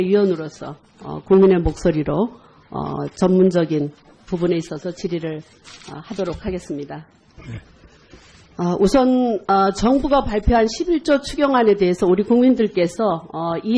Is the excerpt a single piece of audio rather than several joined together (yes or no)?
yes